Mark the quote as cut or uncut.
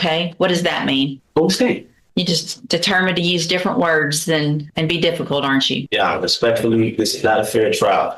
cut